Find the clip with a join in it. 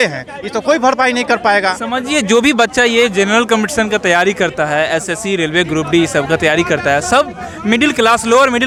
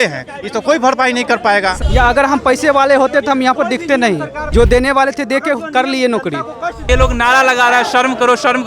second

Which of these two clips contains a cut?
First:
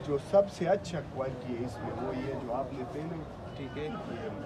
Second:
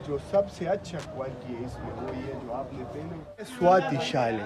second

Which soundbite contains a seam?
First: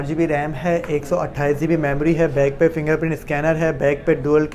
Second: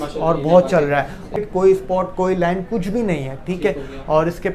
second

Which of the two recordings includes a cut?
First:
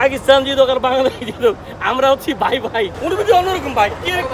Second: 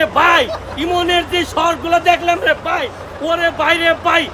first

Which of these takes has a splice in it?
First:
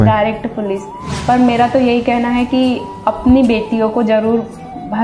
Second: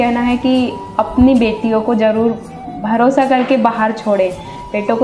first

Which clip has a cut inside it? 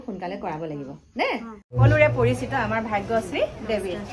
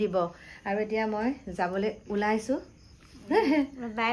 first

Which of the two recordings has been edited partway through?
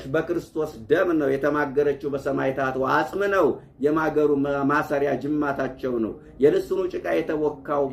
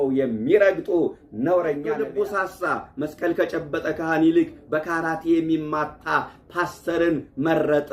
second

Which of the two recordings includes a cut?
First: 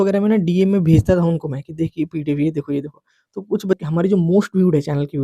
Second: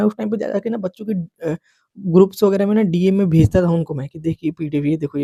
first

